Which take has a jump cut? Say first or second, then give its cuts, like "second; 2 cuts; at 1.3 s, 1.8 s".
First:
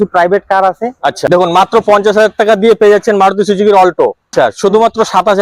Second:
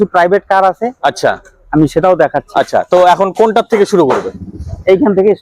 first; 2 cuts; at 1.3 s, 4.3 s